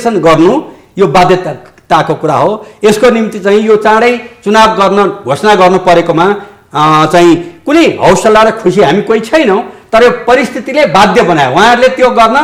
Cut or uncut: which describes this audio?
uncut